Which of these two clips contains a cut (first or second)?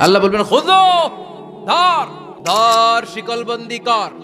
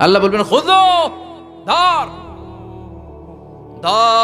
first